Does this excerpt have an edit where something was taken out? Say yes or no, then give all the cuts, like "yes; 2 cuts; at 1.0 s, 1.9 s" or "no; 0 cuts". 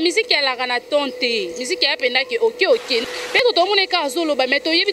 yes; 1 cut; at 3.1 s